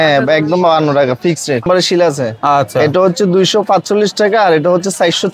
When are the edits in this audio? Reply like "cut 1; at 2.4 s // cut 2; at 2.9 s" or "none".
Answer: cut 1; at 1.6 s